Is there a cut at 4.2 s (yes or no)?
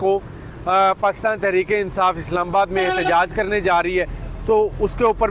no